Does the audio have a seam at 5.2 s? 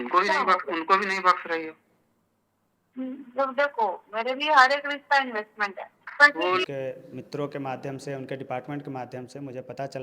no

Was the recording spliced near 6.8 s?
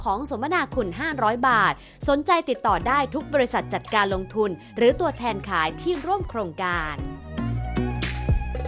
yes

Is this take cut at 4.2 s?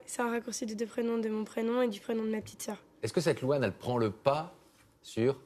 no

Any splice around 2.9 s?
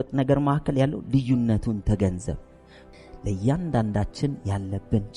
yes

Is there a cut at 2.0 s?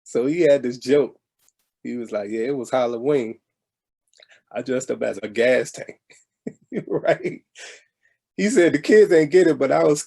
no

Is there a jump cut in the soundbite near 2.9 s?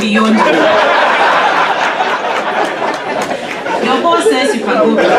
no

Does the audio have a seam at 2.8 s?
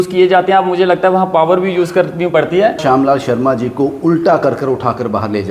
yes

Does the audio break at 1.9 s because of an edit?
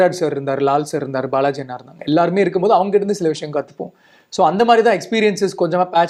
no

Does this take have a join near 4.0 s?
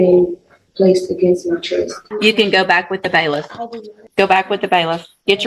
yes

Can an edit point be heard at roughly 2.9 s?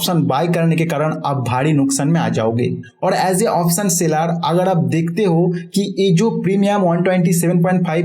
no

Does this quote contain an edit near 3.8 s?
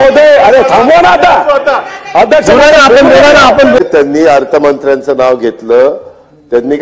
yes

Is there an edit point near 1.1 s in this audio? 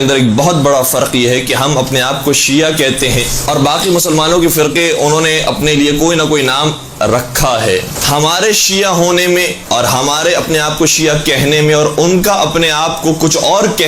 yes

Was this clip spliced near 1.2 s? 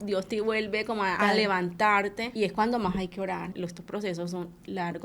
yes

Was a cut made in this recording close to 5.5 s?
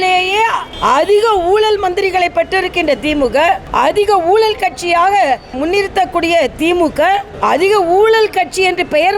yes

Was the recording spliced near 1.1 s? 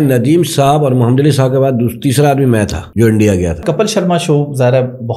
no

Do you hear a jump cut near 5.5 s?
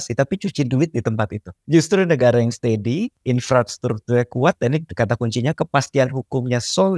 no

